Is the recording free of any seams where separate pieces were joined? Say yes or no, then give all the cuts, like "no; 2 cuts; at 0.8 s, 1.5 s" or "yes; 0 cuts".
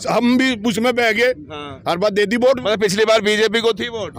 yes; 0 cuts